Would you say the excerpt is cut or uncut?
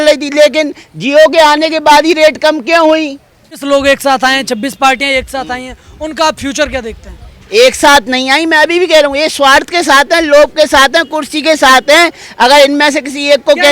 cut